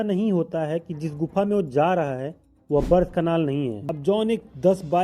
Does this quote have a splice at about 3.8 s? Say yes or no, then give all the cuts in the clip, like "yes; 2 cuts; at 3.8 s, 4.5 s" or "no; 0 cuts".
yes; 1 cut; at 3.8 s